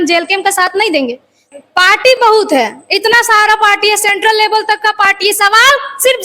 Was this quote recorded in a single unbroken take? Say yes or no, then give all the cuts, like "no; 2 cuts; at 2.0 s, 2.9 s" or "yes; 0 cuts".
no; 1 cut; at 1.4 s